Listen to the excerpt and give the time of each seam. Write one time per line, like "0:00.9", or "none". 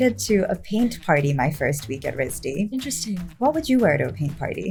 none